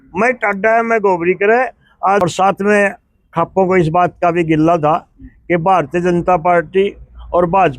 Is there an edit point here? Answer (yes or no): yes